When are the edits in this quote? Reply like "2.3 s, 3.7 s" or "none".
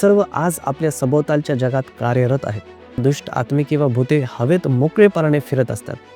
3.0 s

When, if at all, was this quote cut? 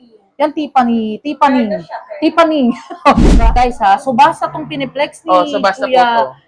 3.4 s

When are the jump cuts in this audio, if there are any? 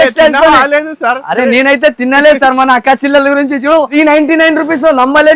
3.9 s

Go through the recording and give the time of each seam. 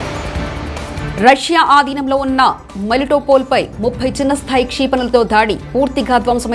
0.9 s

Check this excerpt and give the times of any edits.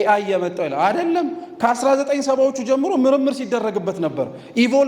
none

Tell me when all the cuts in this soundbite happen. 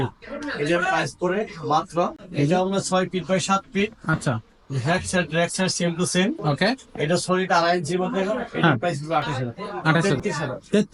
2.2 s, 10.0 s

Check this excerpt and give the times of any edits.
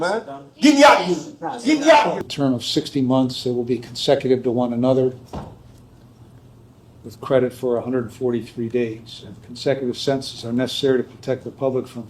2.2 s

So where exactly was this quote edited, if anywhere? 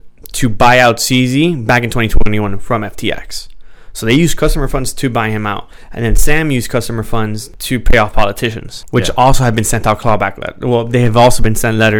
7.5 s, 8.7 s

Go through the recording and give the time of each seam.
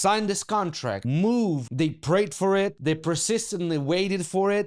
1.0 s, 1.6 s, 2.8 s

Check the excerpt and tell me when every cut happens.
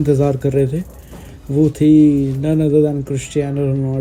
none

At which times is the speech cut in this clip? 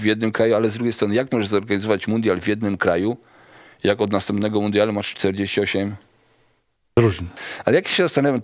7.3 s

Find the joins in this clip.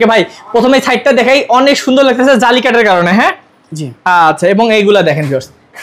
none

